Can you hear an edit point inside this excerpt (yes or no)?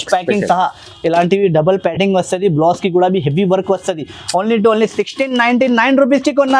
no